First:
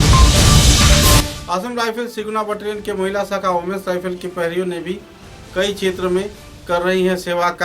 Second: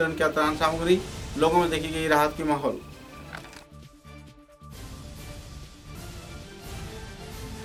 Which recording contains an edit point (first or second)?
first